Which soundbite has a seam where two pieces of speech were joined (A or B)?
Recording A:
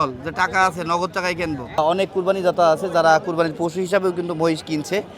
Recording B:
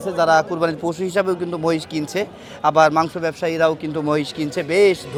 A